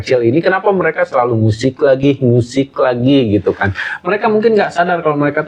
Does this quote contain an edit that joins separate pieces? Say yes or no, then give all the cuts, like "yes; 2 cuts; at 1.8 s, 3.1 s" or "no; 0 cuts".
no; 0 cuts